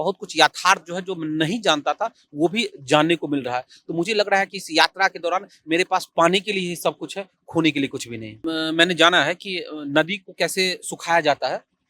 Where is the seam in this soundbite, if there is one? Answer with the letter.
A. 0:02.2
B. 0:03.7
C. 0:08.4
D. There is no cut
C